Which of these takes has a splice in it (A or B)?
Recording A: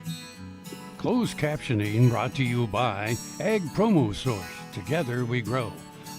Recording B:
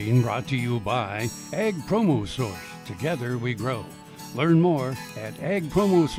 A